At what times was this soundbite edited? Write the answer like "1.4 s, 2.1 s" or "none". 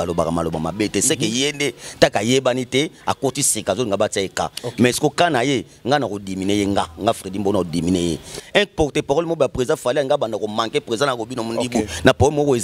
8.3 s